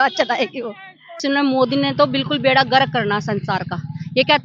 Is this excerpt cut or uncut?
cut